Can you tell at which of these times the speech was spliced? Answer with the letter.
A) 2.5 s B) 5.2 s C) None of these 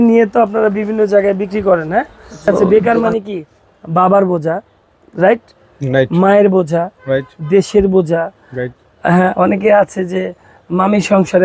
A